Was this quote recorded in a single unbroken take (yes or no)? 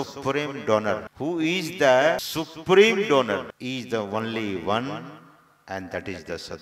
no